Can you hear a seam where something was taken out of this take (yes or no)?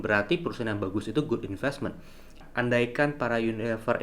yes